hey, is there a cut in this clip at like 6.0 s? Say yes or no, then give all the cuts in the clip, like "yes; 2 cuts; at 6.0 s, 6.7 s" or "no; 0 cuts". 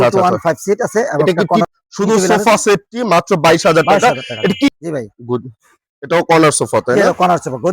no; 2 cuts; at 1.6 s, 4.7 s